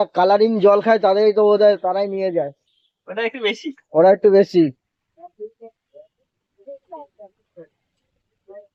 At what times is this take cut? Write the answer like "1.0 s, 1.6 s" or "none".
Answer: none